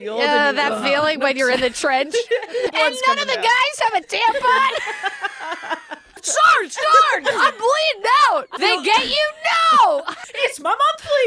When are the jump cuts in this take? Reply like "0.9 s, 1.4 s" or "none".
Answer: 2.7 s, 6.2 s, 8.5 s, 10.2 s